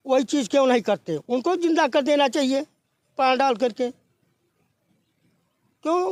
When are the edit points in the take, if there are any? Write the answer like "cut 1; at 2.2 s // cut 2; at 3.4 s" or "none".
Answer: none